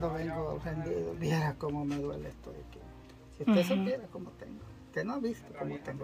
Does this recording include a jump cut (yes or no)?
no